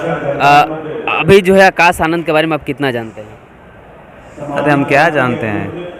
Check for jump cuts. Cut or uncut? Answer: uncut